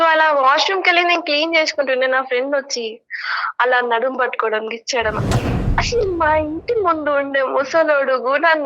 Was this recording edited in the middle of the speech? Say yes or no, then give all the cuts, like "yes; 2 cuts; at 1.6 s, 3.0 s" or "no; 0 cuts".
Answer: yes; 1 cut; at 5.6 s